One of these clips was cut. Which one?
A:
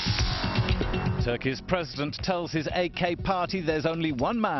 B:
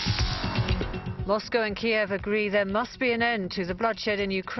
A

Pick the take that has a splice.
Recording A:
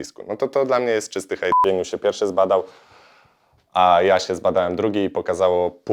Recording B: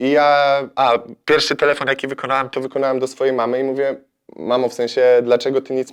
A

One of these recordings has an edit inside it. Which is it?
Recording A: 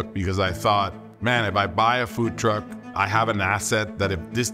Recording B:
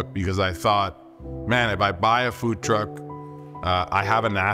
A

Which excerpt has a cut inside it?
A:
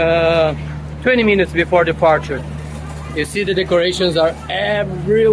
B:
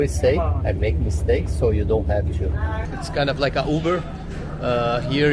B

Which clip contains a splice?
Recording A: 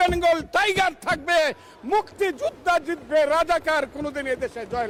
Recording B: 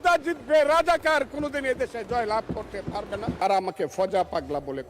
B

